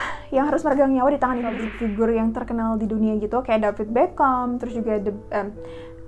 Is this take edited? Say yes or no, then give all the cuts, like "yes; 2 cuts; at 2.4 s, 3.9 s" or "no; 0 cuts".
yes; 1 cut; at 1.7 s